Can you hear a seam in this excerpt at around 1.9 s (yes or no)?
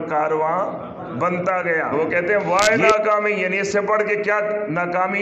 yes